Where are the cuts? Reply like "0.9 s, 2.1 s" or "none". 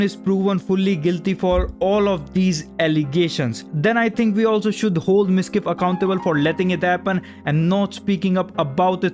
none